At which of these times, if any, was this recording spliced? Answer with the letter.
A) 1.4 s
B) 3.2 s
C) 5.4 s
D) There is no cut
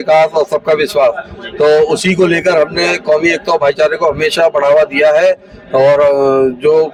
D